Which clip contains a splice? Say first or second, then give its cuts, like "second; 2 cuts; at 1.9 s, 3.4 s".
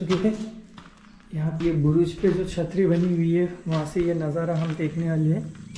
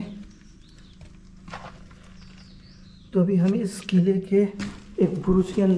first; 1 cut; at 1.6 s